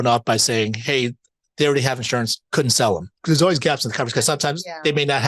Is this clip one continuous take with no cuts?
no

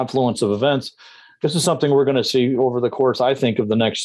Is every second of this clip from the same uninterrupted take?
yes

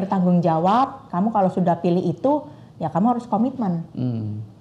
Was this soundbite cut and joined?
no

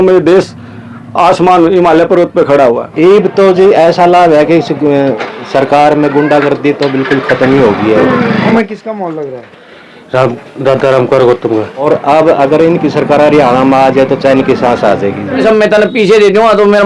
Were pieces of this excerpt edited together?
yes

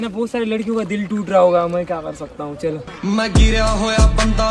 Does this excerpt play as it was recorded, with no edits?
yes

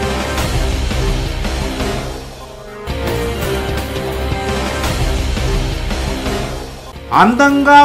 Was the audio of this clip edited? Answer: no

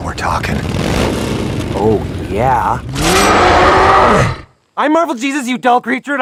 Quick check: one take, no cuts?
yes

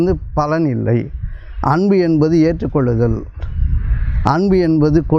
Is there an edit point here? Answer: no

